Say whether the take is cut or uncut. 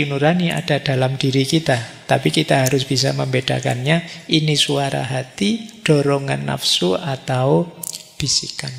uncut